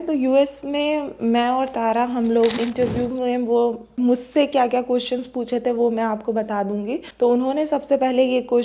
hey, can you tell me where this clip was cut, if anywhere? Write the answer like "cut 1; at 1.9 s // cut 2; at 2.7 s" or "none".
cut 1; at 2.6 s // cut 2; at 3.9 s // cut 3; at 7.0 s